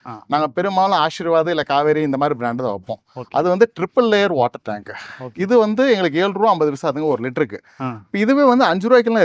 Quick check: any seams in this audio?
no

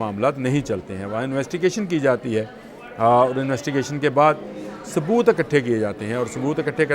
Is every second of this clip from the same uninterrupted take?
yes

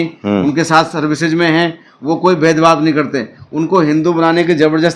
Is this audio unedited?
yes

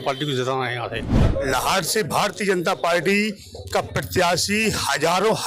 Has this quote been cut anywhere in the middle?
yes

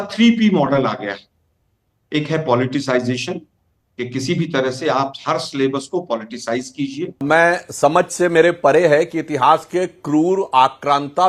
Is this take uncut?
no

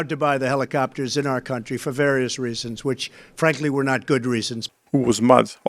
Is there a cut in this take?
yes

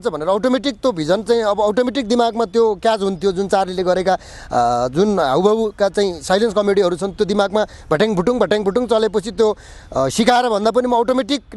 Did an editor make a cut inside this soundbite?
no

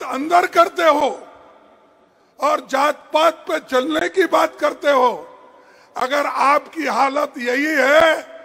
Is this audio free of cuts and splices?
yes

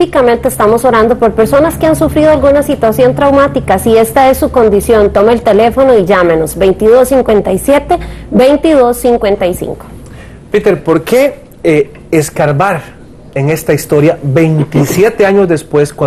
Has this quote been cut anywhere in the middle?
no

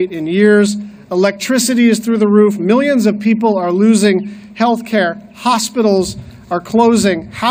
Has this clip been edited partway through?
no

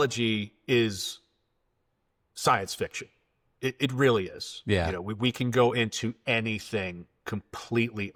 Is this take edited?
no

